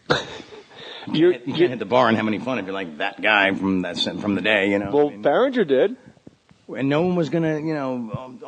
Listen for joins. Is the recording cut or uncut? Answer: cut